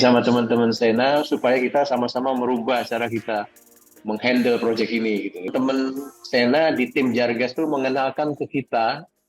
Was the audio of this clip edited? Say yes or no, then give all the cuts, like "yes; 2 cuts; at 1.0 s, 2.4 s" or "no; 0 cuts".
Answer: yes; 1 cut; at 5.5 s